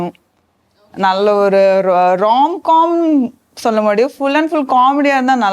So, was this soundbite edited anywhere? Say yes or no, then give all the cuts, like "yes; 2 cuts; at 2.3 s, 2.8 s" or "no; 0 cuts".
no; 0 cuts